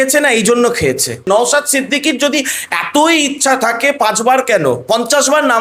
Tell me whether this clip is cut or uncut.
cut